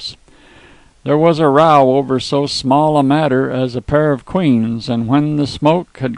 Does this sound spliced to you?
no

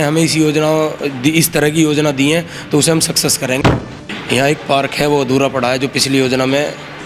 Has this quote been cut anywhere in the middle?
yes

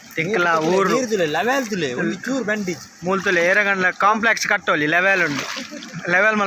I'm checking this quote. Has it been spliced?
no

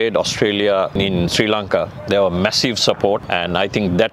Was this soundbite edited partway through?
yes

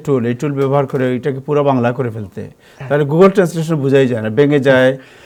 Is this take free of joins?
yes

